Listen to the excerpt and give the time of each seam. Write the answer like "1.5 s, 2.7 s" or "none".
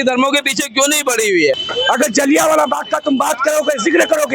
1.7 s